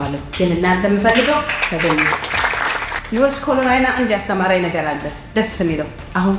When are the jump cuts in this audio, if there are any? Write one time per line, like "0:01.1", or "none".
0:02.9